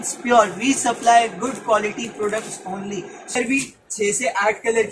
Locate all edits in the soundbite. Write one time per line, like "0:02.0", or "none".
0:03.4